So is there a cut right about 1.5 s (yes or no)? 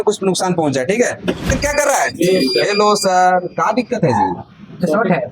yes